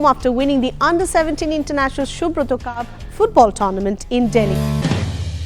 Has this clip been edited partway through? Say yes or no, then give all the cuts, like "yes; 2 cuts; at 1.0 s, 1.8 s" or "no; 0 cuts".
yes; 1 cut; at 4.5 s